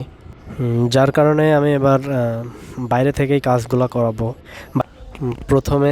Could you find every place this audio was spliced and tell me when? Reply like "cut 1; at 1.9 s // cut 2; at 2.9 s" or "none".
cut 1; at 4.8 s